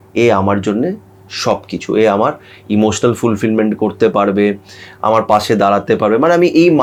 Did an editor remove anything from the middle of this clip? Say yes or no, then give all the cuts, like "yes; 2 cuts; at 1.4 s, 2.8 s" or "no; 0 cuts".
no; 0 cuts